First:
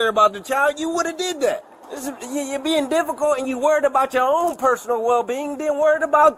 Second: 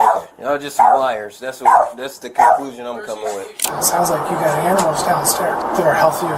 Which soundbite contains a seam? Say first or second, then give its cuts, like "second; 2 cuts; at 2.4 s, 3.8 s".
second; 2 cuts; at 3.7 s, 5.6 s